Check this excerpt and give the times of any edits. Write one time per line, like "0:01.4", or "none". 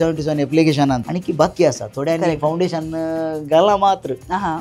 0:01.0